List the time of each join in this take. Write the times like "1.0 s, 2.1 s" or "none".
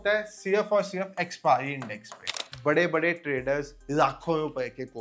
2.4 s